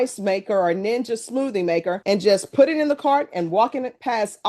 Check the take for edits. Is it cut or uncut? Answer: uncut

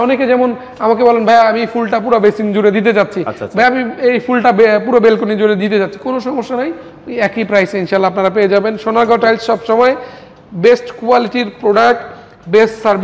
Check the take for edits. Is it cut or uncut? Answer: uncut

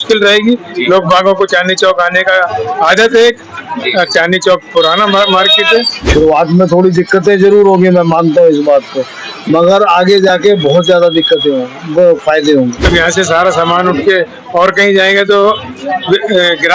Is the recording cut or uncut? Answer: cut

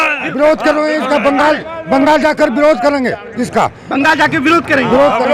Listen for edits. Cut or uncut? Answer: uncut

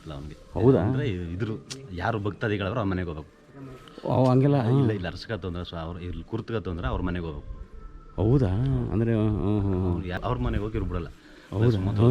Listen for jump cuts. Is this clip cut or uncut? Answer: cut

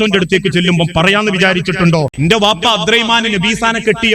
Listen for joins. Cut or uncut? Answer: cut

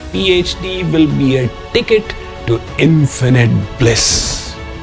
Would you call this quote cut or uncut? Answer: uncut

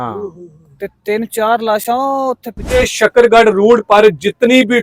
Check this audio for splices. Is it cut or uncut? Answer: cut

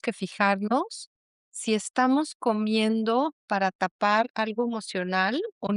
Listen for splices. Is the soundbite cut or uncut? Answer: uncut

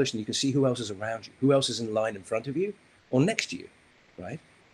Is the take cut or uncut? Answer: uncut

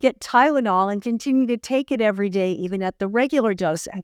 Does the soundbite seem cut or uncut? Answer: uncut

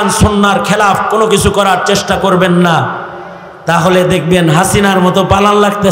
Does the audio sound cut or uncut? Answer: uncut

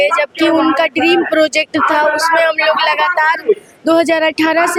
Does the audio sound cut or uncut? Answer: uncut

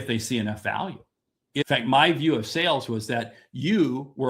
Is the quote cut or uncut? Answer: cut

